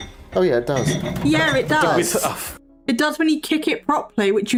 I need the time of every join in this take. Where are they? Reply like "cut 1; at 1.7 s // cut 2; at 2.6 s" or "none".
none